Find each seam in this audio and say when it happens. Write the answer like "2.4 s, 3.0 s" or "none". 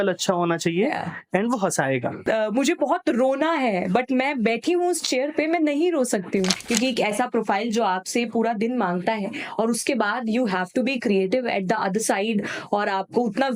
2.2 s, 6.6 s